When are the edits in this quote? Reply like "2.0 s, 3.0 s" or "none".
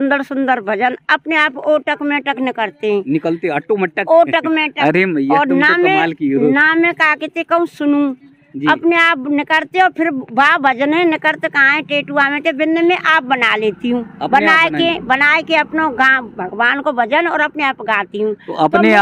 none